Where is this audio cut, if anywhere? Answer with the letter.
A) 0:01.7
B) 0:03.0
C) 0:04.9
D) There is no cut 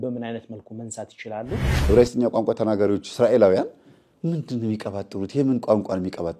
A